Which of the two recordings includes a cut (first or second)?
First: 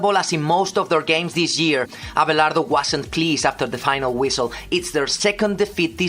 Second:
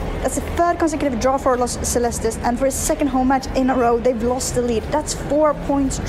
first